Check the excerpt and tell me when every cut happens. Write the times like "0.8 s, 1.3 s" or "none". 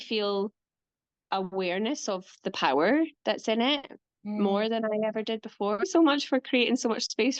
5.9 s